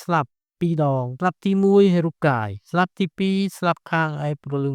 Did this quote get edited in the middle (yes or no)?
yes